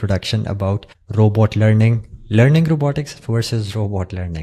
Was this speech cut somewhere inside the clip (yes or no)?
no